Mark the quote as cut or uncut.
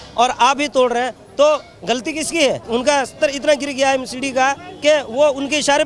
cut